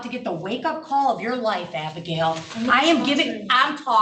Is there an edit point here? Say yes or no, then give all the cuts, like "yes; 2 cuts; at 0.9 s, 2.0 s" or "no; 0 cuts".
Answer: no; 0 cuts